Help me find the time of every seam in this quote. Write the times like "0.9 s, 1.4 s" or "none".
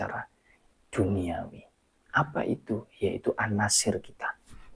none